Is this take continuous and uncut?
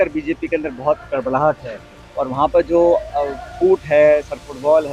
yes; 0 cuts

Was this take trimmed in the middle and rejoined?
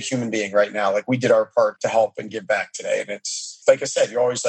yes; 2 cuts; at 1.8 s, 3.5 s

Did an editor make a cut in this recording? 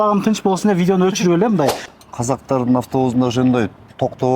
yes; 1 cut; at 1.9 s

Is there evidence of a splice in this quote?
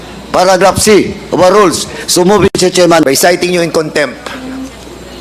yes; 1 cut; at 3.0 s

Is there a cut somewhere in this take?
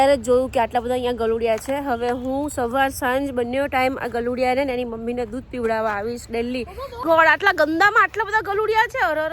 yes; 1 cut; at 7.0 s

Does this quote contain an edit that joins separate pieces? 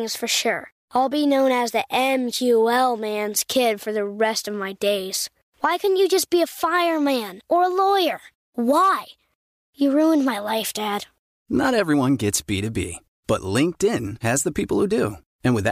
no; 0 cuts

